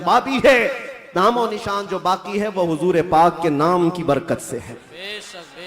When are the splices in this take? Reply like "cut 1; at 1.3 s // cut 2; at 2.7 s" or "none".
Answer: none